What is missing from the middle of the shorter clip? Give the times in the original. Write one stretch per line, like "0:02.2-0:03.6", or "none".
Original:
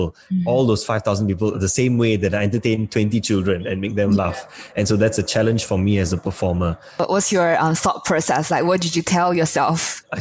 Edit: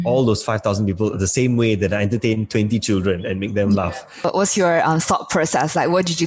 0:04.5-0:06.8